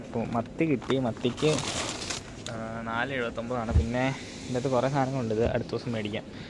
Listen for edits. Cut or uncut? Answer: uncut